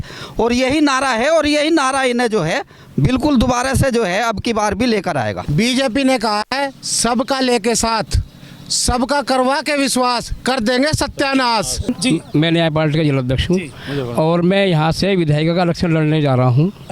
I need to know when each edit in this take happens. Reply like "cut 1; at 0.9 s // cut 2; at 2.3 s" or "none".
cut 1; at 5.4 s // cut 2; at 11.9 s

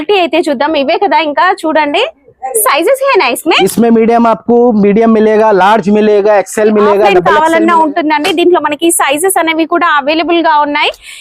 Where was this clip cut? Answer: cut 1; at 7.1 s

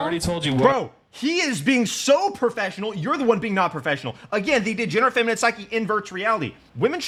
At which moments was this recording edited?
none

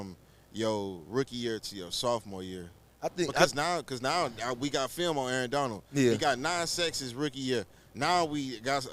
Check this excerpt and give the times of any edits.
none

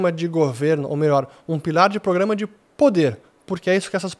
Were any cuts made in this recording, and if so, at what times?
none

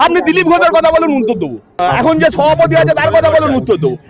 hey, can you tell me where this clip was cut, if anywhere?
cut 1; at 1.8 s

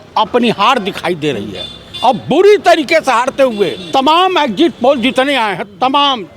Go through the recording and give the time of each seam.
cut 1; at 3.8 s

